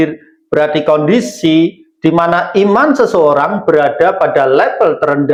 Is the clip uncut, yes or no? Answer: yes